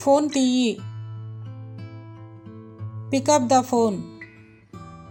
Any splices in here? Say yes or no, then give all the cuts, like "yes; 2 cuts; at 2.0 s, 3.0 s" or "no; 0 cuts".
no; 0 cuts